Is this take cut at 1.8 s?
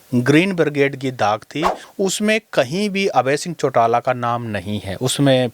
yes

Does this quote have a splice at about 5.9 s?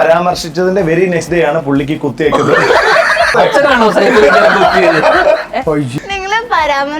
yes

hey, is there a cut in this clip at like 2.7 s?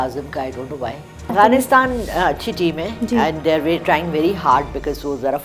no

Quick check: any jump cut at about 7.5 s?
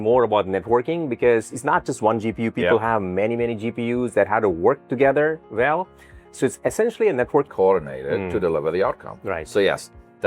yes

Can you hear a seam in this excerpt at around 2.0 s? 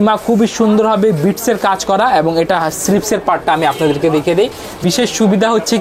no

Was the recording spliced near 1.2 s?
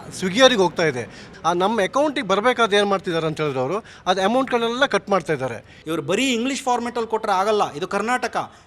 yes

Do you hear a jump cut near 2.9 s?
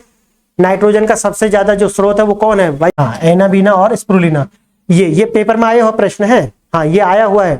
yes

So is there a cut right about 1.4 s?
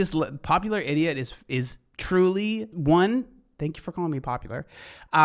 no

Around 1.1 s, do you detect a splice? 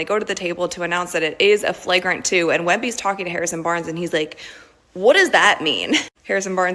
yes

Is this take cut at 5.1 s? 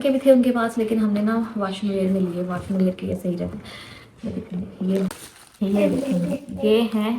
yes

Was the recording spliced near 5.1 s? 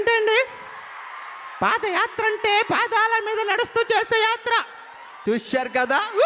yes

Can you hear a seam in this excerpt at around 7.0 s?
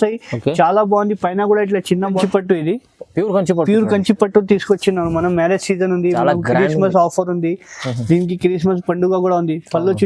no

